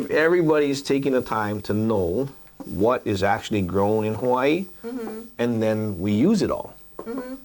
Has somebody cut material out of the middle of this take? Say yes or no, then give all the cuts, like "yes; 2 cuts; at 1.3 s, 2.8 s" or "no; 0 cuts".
no; 0 cuts